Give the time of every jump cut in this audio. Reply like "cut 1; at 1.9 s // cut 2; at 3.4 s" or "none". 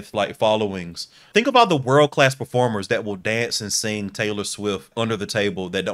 cut 1; at 1.3 s // cut 2; at 4.9 s